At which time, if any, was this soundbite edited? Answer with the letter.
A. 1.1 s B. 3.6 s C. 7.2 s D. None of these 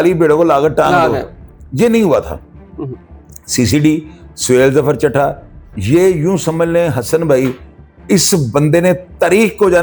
D